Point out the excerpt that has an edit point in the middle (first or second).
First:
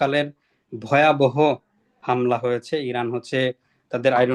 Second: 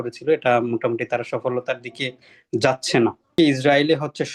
second